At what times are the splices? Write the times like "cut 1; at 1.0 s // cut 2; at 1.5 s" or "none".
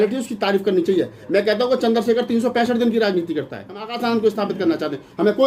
cut 1; at 3.9 s